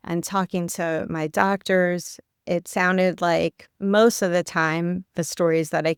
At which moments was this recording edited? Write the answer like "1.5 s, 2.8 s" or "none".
none